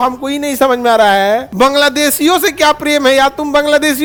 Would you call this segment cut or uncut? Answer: uncut